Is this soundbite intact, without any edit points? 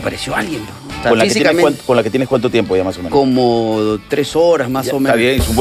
no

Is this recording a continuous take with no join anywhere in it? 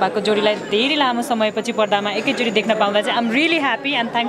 yes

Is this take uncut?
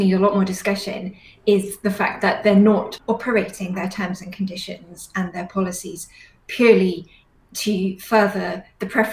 no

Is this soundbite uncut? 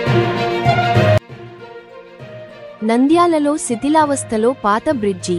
yes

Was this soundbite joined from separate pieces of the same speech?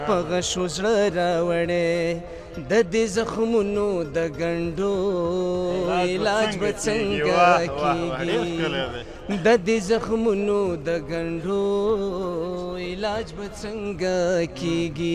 no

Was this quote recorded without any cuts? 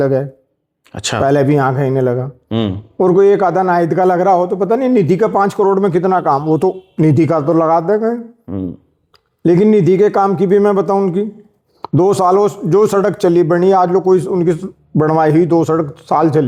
yes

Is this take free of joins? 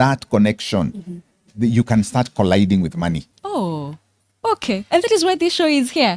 yes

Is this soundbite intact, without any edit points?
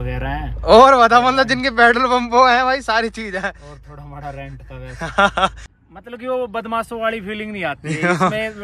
no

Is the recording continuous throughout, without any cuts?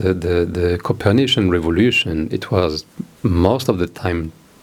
yes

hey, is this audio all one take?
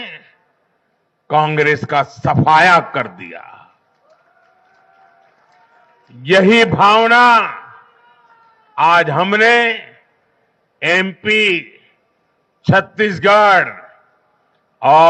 yes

